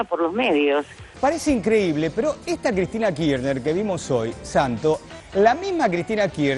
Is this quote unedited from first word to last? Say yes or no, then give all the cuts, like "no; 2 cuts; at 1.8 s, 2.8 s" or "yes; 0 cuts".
yes; 0 cuts